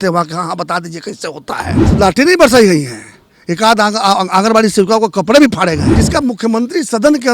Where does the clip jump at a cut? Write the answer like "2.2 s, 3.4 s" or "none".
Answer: 1.8 s, 5.9 s